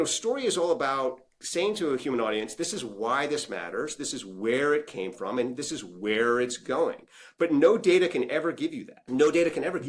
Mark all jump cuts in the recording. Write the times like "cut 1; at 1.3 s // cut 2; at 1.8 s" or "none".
cut 1; at 8.9 s